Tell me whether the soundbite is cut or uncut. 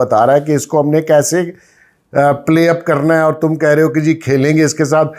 uncut